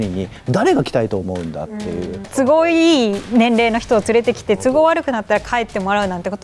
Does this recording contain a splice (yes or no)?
yes